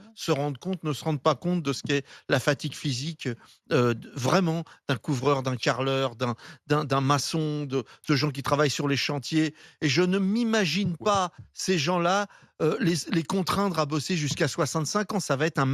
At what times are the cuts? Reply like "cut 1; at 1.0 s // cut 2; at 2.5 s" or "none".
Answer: none